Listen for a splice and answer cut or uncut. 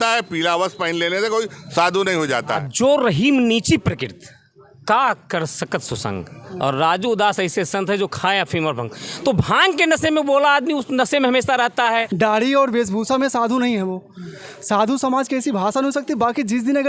cut